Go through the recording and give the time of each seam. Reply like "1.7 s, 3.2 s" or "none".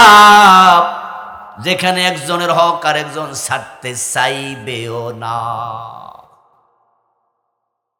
none